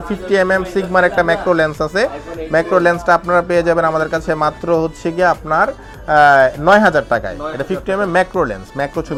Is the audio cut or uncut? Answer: uncut